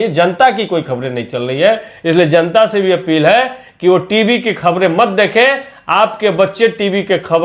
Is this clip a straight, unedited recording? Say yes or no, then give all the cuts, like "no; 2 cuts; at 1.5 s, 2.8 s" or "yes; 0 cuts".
yes; 0 cuts